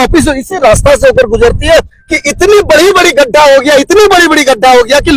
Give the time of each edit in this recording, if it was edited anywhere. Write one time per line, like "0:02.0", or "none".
0:02.0